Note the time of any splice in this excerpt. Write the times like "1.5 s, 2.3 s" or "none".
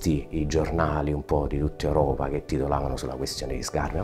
none